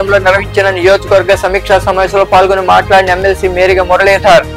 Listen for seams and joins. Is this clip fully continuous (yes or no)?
yes